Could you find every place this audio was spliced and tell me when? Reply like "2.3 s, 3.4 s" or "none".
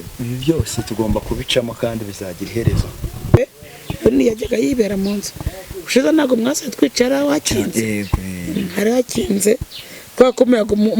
3.4 s